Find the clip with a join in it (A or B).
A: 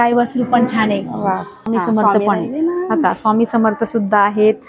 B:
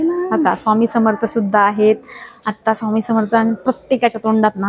A